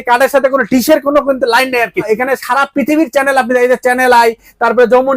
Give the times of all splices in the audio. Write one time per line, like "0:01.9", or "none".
0:02.0